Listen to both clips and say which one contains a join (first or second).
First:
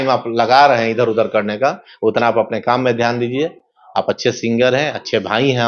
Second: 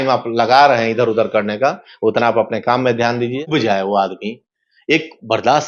second